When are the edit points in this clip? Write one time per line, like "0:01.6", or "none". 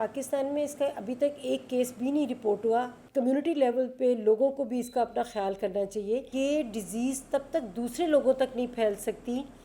0:03.0
0:06.3